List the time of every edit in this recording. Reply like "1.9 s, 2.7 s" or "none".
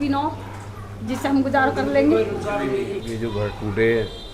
3.1 s